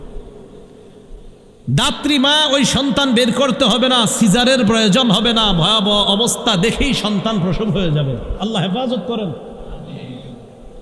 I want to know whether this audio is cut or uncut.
uncut